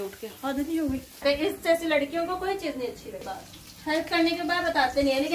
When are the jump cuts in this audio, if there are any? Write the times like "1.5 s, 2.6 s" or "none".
1.2 s, 3.2 s